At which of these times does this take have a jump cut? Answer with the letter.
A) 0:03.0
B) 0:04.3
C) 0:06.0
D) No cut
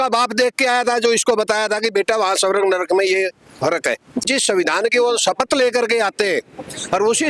B